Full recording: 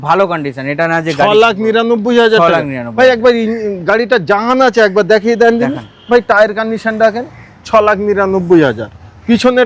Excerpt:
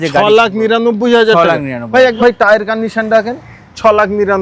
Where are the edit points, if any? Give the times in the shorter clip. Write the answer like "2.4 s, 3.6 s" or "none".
2.1 s